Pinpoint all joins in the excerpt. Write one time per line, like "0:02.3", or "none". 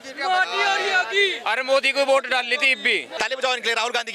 0:03.1